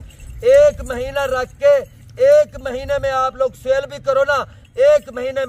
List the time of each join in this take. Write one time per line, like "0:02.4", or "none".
none